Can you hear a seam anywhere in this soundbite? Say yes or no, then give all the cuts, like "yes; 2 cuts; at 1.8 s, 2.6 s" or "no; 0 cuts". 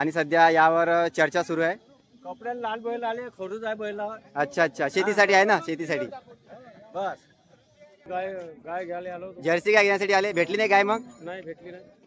yes; 1 cut; at 8.1 s